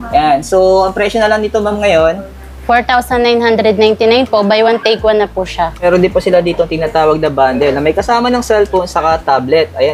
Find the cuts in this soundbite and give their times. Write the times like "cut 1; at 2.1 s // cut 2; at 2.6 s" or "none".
cut 1; at 5.8 s